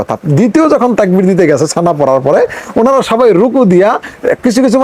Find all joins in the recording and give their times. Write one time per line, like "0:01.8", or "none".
none